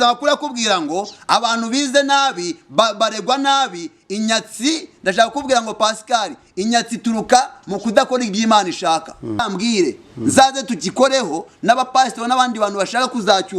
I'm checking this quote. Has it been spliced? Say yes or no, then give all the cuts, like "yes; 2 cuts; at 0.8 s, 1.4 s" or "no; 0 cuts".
yes; 1 cut; at 9.5 s